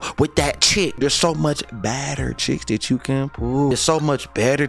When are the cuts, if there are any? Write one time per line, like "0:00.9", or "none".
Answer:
0:01.0
0:03.7